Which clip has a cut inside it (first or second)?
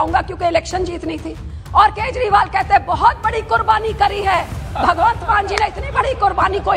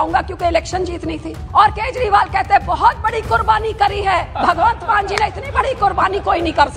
second